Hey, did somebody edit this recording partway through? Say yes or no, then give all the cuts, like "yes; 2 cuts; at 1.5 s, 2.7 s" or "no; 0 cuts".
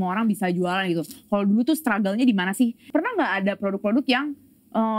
yes; 1 cut; at 2.8 s